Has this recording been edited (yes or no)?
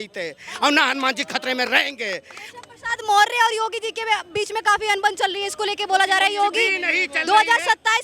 no